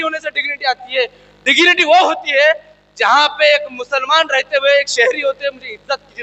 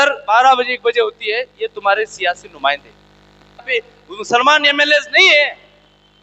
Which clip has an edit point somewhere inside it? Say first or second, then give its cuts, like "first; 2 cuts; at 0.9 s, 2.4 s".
second; 1 cut; at 3.7 s